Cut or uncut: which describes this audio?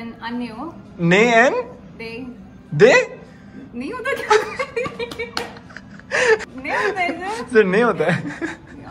uncut